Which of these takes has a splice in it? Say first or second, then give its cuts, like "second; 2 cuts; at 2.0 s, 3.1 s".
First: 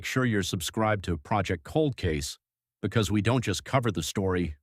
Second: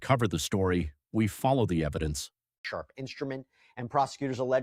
second; 1 cut; at 2.6 s